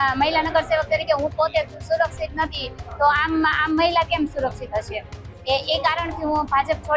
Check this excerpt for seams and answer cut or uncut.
uncut